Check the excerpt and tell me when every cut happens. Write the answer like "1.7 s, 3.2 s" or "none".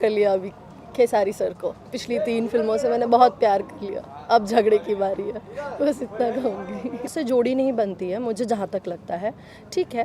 7.1 s